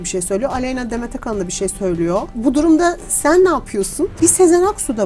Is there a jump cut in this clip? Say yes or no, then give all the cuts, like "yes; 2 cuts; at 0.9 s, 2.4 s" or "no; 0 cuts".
yes; 2 cuts; at 2.3 s, 4.1 s